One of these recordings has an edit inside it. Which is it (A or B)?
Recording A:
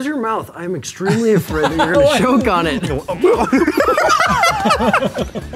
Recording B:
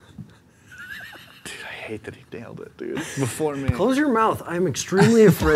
A